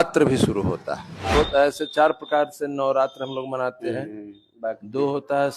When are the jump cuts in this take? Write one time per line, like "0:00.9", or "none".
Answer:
0:01.3